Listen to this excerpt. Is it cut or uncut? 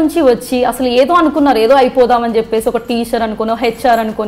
uncut